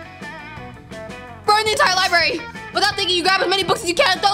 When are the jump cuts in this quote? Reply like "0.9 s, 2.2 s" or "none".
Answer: 1.4 s

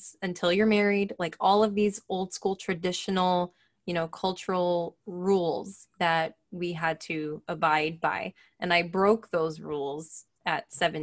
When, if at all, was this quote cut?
none

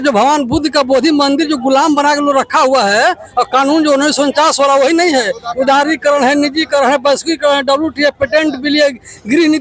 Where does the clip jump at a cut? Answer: none

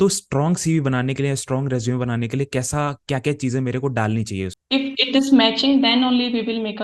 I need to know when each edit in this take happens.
4.6 s

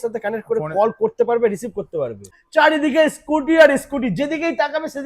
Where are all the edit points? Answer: 2.4 s

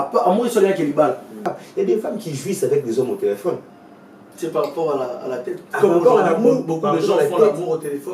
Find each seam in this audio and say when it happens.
1.4 s

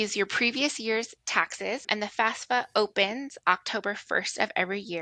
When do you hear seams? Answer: 1.8 s

